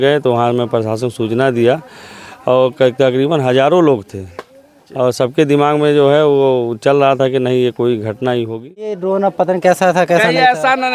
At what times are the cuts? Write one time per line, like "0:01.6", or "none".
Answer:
0:09.0